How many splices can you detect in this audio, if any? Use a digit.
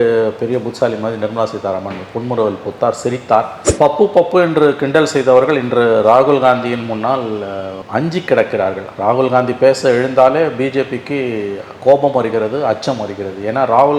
1